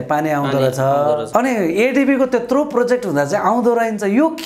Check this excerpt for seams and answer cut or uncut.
cut